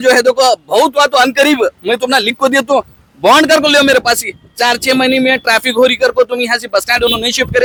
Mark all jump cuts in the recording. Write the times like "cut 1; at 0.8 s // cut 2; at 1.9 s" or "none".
none